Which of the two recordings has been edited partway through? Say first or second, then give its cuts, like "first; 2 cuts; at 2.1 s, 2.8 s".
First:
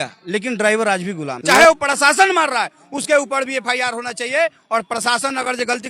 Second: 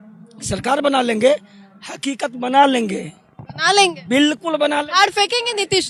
first; 1 cut; at 1.3 s